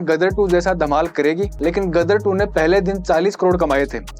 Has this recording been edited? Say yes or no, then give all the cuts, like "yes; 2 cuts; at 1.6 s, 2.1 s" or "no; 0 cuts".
yes; 1 cut; at 1.5 s